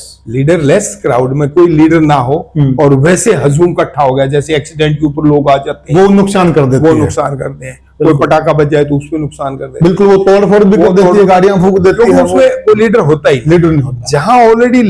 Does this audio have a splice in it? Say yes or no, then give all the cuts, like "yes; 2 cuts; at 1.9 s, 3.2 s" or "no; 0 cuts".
no; 0 cuts